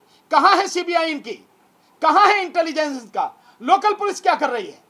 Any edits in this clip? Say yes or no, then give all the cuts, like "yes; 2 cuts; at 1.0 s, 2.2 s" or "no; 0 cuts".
no; 0 cuts